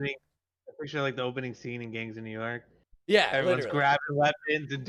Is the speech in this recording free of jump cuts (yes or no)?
yes